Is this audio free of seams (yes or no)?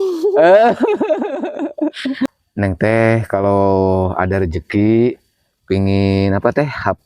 no